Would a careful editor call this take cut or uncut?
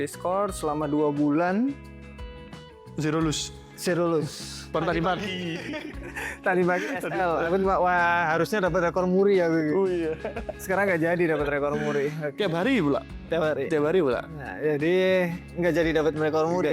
uncut